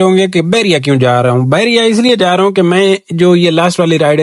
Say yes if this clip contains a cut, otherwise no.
no